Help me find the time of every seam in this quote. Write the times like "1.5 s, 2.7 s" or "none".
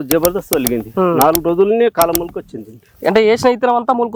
none